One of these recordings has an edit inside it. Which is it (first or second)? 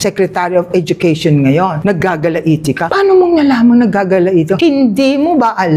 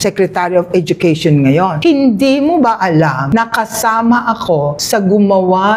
second